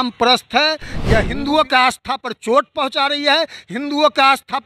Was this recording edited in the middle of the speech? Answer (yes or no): yes